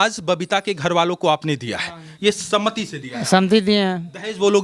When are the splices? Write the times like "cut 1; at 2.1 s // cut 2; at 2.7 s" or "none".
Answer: cut 1; at 2.1 s